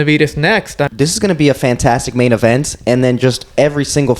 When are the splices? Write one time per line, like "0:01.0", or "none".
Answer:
0:00.9